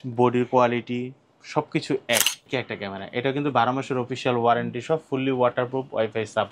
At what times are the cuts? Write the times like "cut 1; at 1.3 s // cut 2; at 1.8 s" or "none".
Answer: cut 1; at 2.5 s